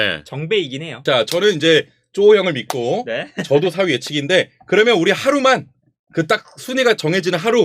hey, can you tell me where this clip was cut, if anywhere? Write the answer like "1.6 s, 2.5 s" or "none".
0.9 s